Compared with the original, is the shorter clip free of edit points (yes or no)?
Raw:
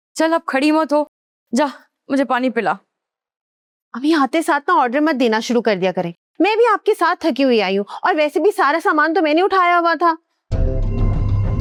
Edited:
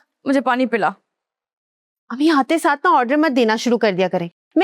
yes